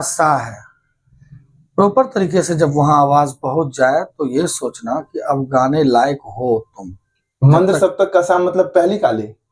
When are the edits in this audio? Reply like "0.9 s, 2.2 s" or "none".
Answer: none